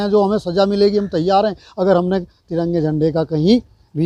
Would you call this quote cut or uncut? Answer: uncut